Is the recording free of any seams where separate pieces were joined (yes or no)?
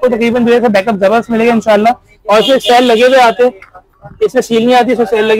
yes